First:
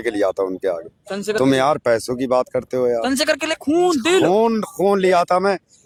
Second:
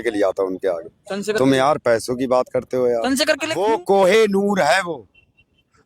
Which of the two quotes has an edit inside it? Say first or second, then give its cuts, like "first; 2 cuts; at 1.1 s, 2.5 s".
second; 1 cut; at 3.6 s